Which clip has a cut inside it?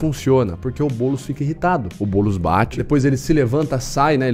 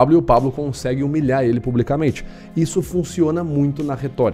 first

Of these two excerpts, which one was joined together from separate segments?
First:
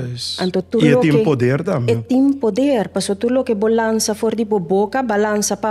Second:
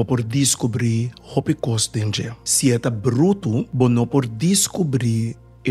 second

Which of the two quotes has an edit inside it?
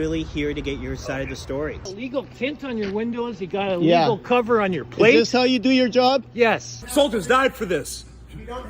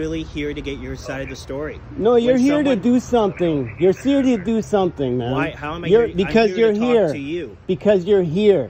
first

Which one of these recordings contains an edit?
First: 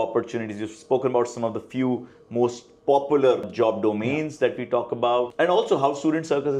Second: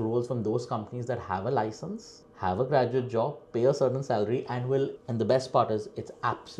second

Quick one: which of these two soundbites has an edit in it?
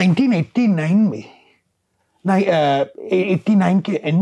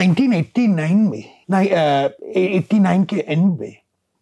second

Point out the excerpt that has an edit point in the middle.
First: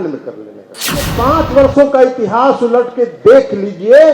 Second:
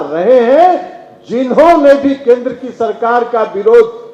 first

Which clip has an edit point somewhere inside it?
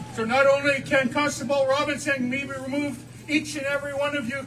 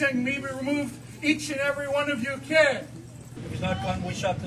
second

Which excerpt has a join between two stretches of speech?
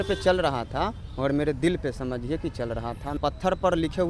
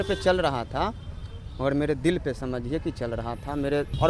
first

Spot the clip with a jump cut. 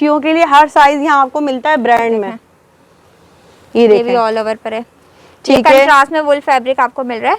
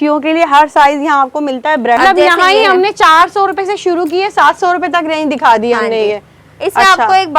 second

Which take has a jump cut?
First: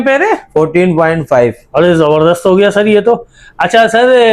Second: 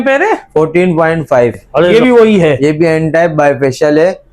second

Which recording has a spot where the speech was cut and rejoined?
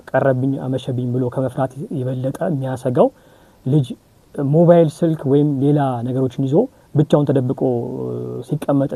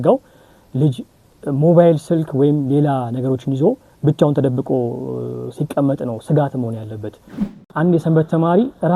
second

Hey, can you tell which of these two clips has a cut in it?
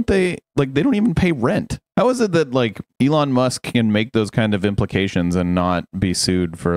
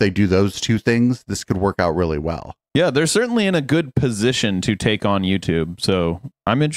first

